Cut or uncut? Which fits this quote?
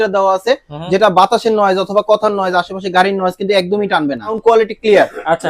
cut